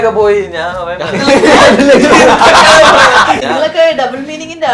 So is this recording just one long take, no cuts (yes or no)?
no